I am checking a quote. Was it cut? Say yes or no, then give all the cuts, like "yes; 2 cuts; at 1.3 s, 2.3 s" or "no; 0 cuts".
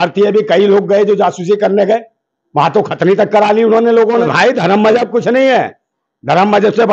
yes; 1 cut; at 4.2 s